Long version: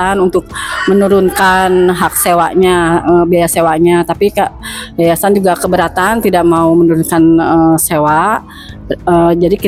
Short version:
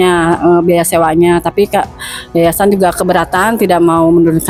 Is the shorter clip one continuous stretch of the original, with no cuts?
yes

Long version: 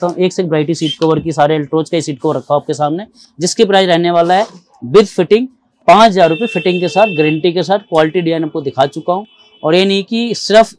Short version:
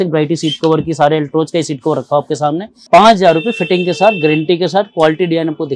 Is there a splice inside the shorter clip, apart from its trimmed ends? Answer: yes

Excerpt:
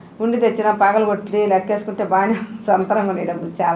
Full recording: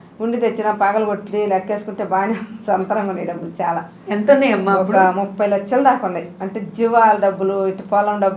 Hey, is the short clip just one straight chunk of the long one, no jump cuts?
yes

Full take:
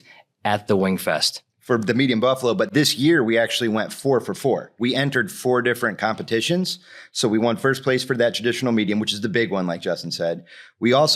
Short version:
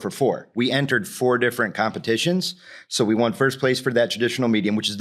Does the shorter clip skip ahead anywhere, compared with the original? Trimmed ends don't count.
no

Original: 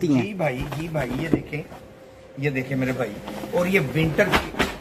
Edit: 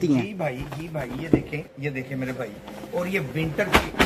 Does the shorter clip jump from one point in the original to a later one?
yes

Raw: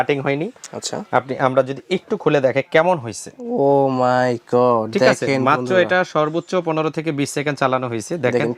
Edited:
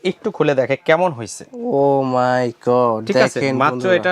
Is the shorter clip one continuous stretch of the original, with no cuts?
yes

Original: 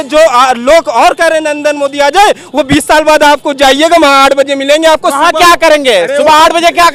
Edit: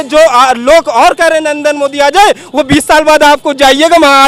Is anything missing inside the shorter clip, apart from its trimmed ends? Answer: no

